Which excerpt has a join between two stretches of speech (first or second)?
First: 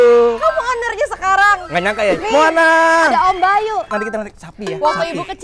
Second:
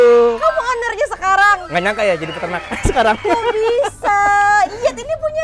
first